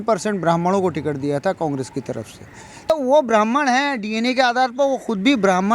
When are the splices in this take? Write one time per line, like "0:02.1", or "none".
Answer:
0:02.9